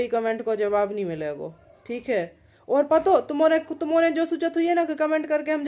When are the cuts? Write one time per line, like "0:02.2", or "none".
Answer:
none